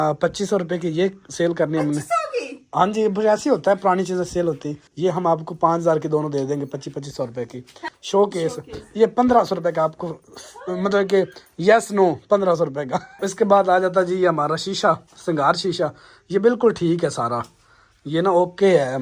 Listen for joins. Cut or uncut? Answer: cut